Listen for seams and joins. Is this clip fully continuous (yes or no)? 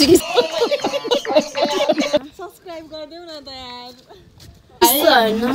no